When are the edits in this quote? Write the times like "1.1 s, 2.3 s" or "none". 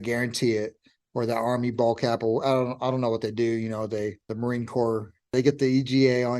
4.3 s, 5.3 s